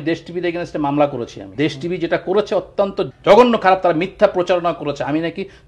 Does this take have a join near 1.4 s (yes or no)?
yes